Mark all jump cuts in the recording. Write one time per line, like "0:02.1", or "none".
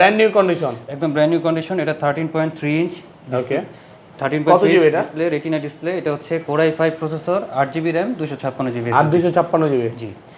none